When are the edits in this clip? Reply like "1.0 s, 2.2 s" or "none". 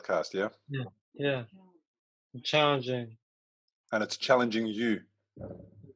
none